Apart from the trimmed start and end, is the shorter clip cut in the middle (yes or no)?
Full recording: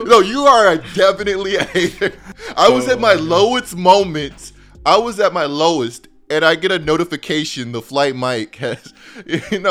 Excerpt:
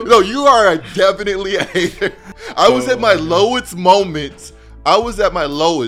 no